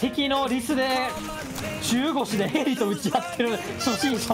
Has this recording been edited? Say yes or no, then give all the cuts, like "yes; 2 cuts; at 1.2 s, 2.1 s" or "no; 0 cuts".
no; 0 cuts